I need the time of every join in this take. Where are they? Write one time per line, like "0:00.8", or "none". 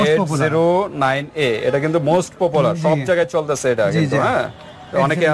none